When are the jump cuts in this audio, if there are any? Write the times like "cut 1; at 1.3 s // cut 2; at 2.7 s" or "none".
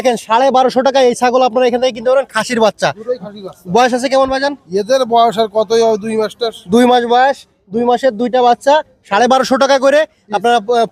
none